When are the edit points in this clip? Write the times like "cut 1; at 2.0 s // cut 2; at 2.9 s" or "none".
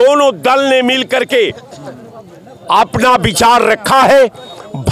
none